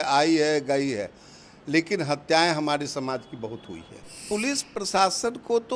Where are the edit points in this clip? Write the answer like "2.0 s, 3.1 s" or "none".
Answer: 4.2 s